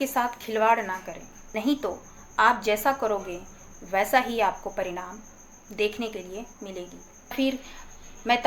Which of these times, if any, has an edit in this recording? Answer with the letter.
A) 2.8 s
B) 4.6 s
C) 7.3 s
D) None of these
C